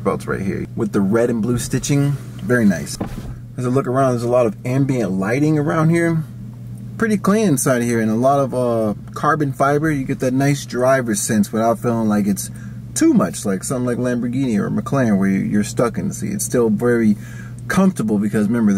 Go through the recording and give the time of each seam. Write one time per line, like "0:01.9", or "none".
none